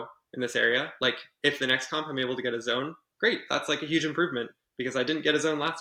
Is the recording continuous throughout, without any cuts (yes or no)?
yes